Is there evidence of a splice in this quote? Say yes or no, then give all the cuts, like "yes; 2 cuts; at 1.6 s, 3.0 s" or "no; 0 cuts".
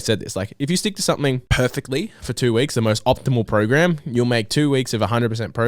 yes; 1 cut; at 1.5 s